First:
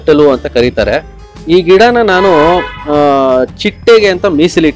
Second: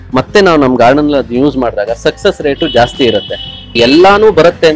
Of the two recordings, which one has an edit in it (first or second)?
second